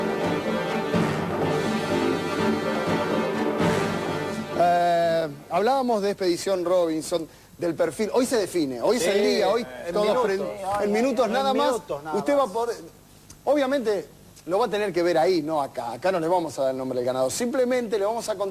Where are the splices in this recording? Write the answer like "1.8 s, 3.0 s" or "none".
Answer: 2.1 s